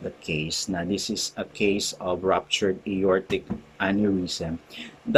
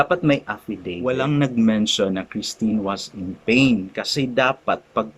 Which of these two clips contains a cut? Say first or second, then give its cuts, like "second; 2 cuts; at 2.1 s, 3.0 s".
second; 1 cut; at 0.9 s